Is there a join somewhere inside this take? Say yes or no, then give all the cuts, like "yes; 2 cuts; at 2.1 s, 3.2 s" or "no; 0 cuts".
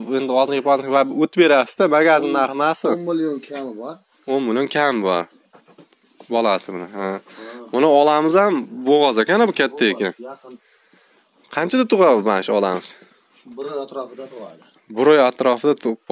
no; 0 cuts